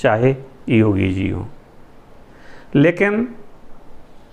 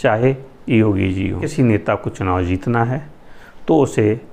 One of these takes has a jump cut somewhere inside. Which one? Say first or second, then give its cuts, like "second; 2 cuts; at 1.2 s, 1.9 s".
second; 1 cut; at 1.5 s